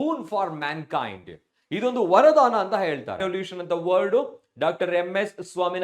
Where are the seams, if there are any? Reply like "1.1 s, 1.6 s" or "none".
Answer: 3.2 s